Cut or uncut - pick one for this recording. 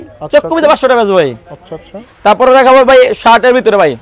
uncut